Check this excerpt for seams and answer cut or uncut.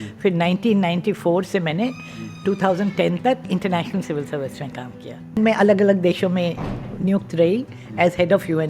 cut